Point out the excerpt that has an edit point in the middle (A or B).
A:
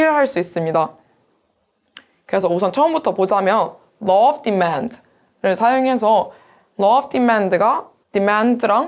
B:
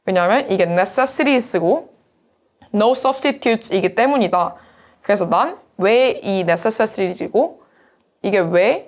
A